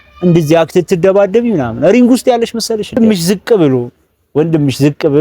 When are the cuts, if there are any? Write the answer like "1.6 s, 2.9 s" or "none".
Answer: 3.1 s